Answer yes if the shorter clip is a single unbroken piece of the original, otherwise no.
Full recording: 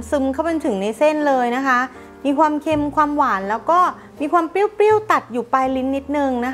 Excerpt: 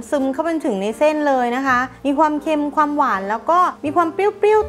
no